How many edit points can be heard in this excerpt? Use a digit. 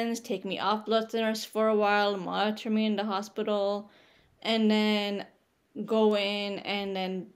0